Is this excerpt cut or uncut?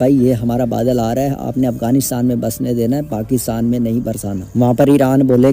uncut